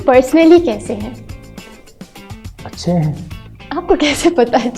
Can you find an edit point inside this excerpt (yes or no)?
no